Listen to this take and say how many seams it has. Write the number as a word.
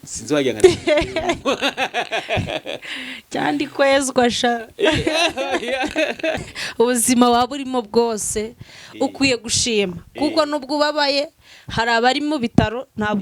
one